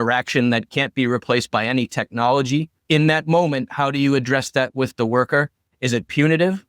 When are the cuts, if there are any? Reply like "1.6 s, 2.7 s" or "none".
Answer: 2.8 s